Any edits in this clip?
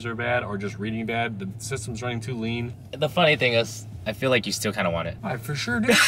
yes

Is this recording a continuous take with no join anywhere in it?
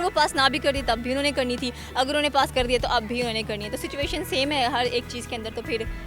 yes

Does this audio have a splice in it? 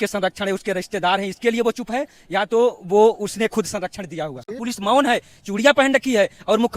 yes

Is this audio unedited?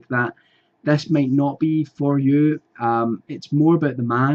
yes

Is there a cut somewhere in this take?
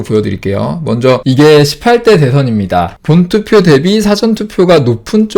yes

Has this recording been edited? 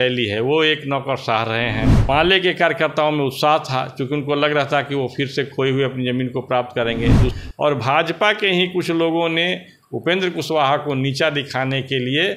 yes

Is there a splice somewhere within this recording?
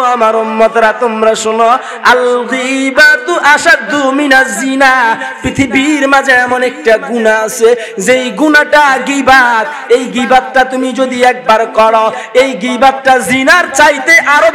no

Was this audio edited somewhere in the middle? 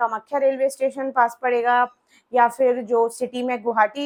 no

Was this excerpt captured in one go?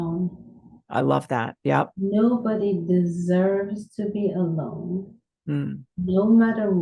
no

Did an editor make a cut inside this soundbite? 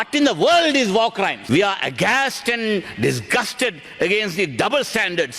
yes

